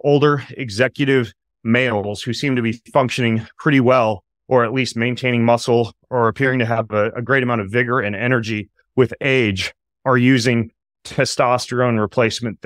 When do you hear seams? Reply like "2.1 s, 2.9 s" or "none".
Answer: none